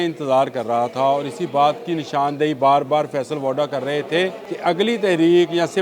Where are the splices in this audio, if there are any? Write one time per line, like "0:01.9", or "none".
0:04.5

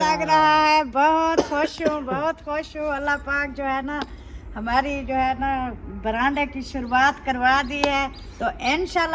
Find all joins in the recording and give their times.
none

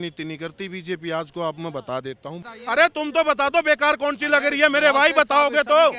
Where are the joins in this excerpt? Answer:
0:02.4

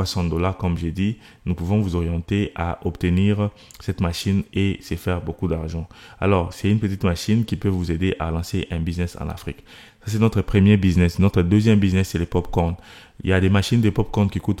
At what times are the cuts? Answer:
none

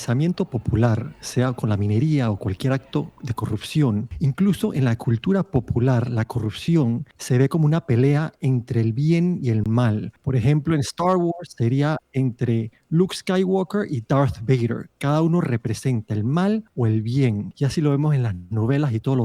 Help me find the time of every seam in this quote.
0:04.1
0:07.1
0:10.1
0:16.7
0:17.5

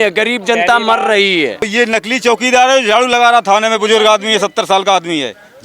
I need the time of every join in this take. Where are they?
0:01.7

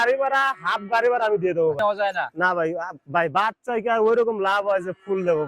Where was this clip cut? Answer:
0:01.8

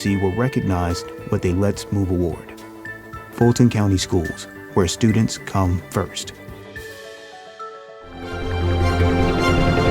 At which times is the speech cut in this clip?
0:08.2

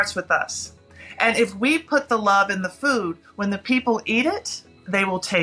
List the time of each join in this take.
none

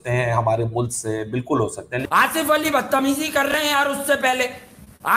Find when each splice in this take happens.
0:02.0

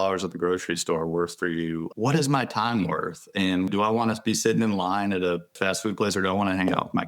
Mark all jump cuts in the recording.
0:01.9
0:03.7
0:05.6

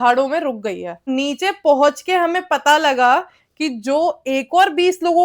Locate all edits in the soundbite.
0:01.1

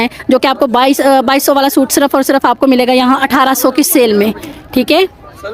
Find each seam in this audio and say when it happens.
none

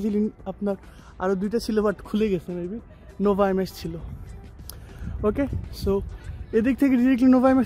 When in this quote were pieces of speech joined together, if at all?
none

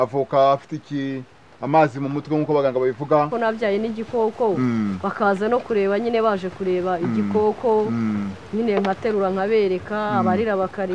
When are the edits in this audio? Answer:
0:03.3

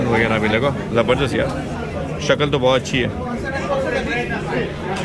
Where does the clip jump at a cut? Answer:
none

